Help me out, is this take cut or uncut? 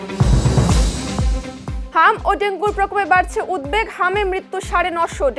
cut